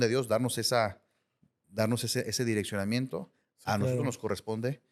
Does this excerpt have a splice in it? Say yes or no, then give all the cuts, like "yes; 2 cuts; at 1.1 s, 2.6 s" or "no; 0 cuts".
no; 0 cuts